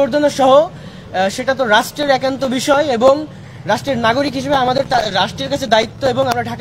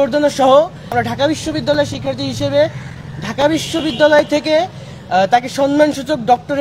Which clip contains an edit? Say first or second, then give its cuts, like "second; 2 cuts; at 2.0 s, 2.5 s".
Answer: second; 1 cut; at 0.9 s